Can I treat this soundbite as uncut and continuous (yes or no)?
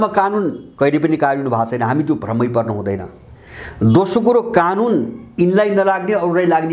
yes